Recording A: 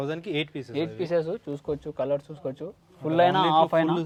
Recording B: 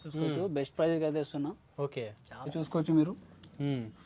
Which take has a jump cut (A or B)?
B